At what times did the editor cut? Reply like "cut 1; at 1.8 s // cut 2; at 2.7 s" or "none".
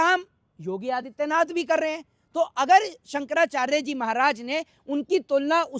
none